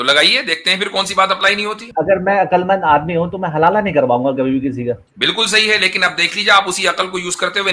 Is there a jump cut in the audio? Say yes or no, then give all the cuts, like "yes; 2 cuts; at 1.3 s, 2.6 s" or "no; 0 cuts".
yes; 2 cuts; at 1.9 s, 5.1 s